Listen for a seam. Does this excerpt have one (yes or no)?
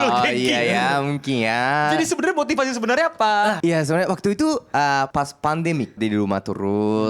yes